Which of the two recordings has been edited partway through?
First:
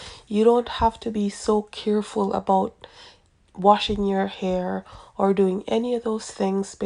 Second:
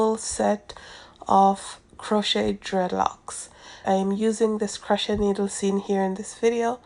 second; 1 cut; at 3.8 s

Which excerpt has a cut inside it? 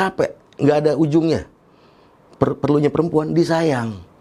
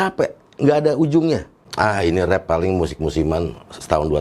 second; 1 cut; at 1.6 s

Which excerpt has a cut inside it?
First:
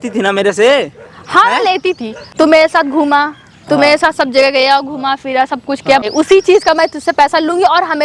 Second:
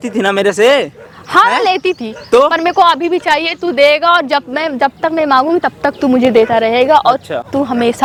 first; 2 cuts; at 2.1 s, 6.0 s

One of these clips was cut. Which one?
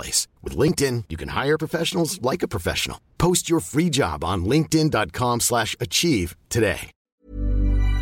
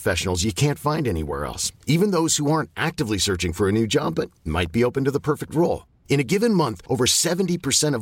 first; 1 cut; at 7.1 s

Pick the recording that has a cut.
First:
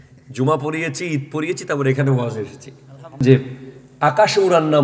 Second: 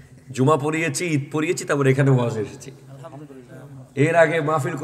first; 1 cut; at 3.2 s

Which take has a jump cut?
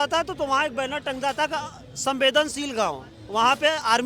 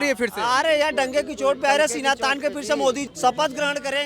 second; 1 cut; at 3.1 s

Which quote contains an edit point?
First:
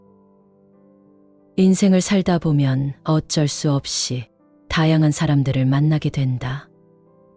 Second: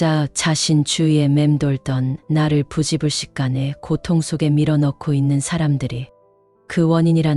first; 1 cut; at 1.5 s

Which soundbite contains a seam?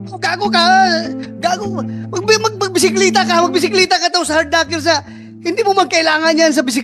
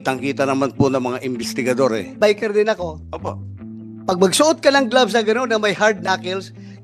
second; 1 cut; at 2.1 s

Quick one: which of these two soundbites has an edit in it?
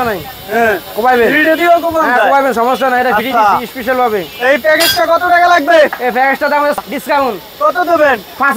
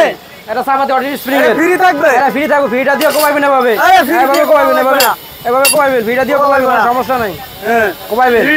first; 1 cut; at 6.8 s

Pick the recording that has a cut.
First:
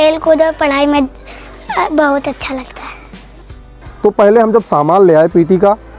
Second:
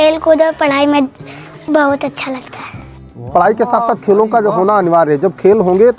second; 2 cuts; at 1.6 s, 3.3 s

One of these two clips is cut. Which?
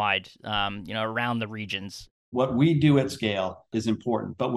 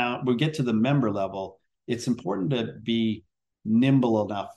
first; 2 cuts; at 2.3 s, 3.7 s

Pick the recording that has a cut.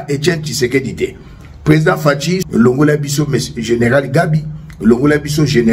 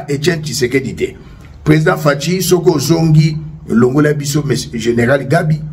first; 1 cut; at 2.4 s

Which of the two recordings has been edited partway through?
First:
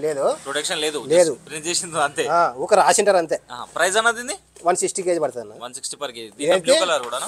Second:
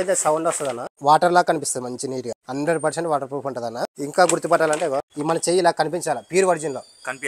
second; 4 cuts; at 1.0 s, 2.4 s, 3.9 s, 5.1 s

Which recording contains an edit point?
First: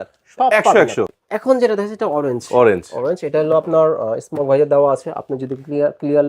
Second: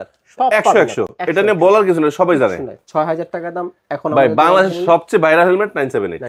first; 1 cut; at 1.2 s

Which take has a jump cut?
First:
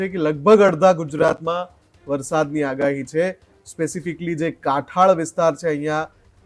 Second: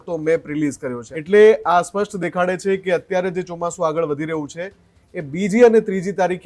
second; 1 cut; at 1.1 s

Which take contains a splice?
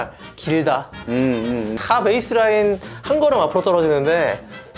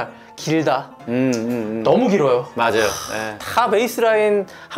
first; 1 cut; at 1.7 s

